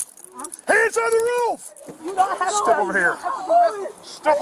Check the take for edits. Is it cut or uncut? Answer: uncut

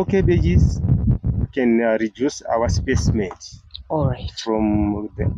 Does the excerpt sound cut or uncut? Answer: uncut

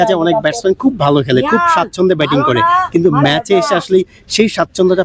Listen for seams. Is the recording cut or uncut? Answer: uncut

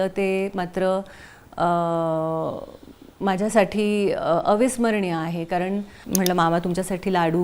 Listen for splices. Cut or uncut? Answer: cut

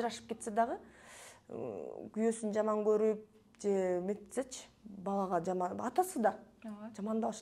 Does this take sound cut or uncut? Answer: uncut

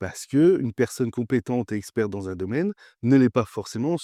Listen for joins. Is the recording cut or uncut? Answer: uncut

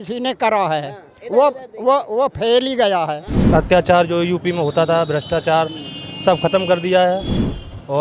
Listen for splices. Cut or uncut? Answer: cut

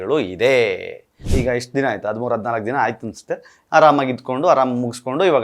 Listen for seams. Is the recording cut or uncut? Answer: cut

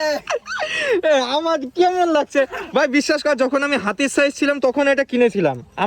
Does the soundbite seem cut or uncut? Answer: uncut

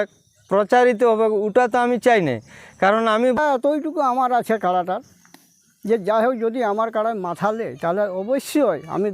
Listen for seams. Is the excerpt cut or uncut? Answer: cut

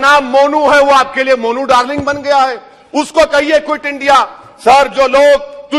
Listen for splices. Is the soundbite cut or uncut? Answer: uncut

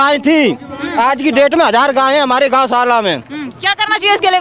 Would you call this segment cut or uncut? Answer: uncut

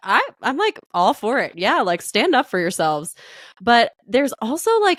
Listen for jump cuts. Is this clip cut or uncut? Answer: uncut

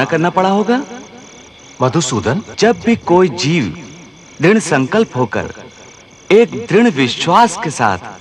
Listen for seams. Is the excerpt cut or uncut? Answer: cut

